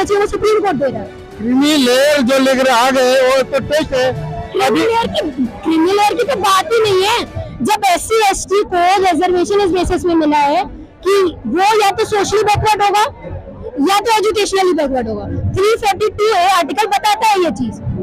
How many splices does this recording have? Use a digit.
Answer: 0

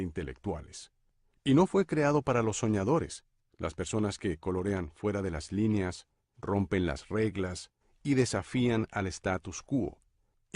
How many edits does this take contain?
1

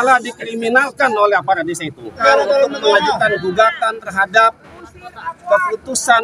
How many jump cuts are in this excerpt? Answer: 1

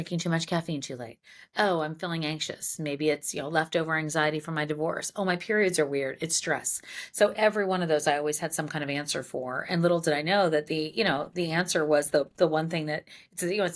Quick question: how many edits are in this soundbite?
0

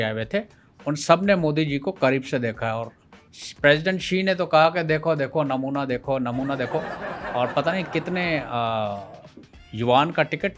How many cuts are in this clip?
0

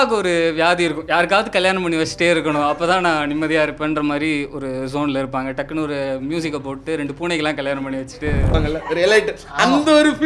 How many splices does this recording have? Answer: 1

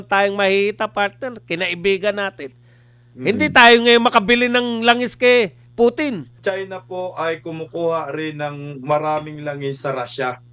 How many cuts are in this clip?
1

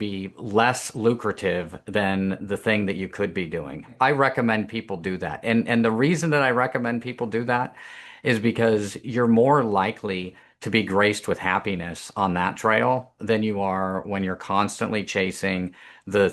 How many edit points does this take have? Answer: 1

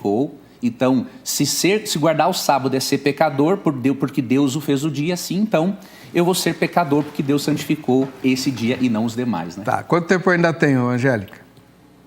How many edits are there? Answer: 0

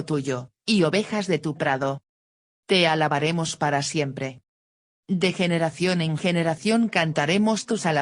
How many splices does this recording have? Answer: 1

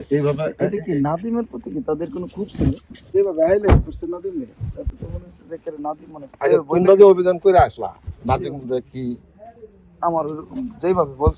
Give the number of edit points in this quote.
1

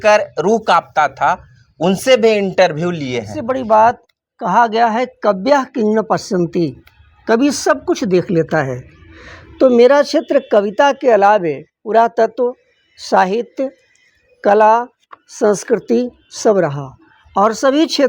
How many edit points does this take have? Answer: 1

